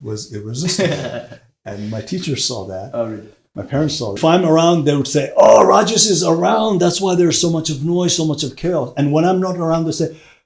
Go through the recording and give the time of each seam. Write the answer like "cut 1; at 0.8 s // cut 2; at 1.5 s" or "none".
cut 1; at 4.1 s